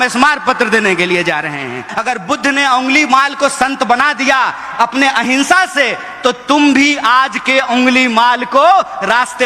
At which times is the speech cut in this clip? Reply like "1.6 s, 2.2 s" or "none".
1.9 s